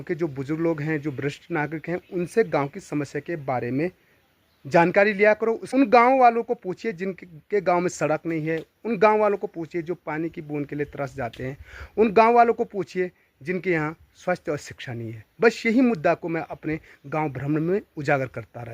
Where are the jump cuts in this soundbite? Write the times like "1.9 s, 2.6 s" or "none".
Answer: 5.6 s